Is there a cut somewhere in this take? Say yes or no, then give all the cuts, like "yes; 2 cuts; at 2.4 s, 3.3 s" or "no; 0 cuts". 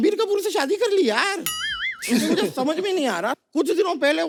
no; 0 cuts